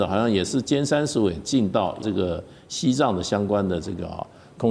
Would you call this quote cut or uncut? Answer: cut